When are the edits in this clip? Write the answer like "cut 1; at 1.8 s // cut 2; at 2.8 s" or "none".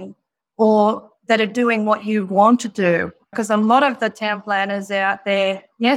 cut 1; at 3.3 s